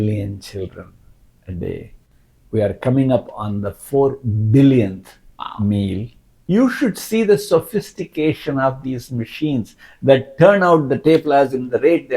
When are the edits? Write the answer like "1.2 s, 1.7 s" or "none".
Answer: 6.3 s